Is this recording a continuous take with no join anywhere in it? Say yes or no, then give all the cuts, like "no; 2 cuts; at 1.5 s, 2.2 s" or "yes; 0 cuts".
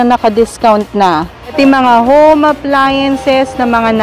no; 1 cut; at 1.5 s